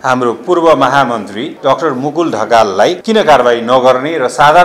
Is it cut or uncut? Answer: cut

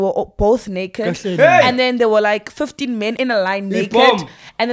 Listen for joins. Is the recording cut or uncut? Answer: cut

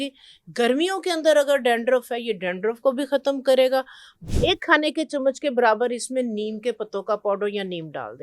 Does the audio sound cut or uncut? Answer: cut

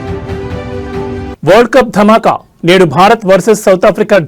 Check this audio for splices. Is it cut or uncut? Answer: uncut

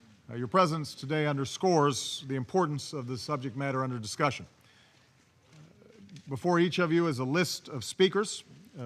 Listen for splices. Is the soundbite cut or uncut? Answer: cut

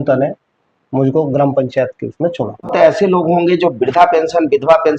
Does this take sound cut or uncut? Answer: cut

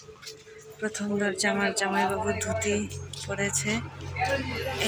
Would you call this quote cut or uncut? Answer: uncut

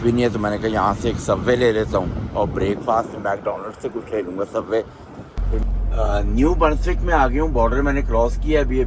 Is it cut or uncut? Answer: cut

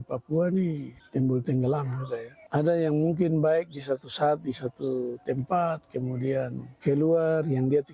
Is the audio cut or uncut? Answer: cut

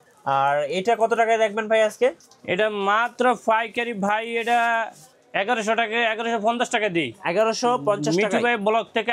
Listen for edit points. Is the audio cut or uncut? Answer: uncut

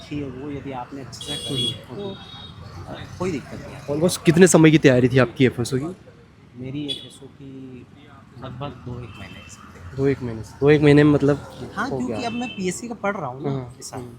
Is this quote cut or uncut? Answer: uncut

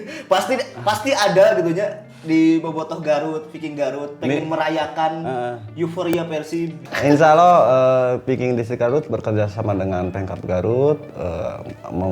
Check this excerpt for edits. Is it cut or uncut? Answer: cut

